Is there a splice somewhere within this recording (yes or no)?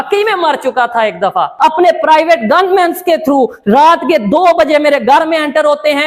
yes